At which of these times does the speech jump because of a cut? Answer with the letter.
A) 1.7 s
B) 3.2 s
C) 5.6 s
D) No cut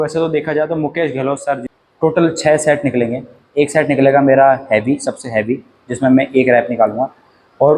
A